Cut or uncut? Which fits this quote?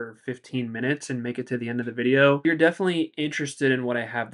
cut